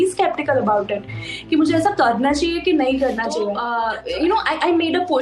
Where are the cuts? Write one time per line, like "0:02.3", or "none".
0:03.6